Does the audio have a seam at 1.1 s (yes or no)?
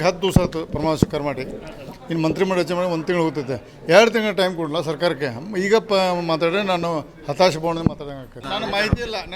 no